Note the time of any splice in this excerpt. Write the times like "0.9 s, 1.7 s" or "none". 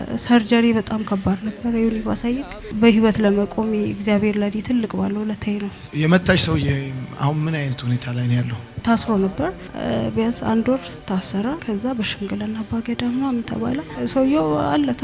5.8 s, 8.7 s, 13.9 s